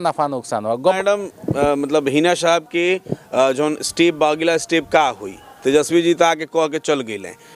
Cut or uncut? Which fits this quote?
cut